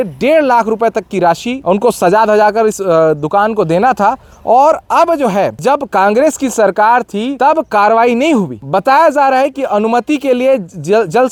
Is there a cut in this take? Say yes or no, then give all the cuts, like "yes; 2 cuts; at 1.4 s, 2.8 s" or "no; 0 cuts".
no; 0 cuts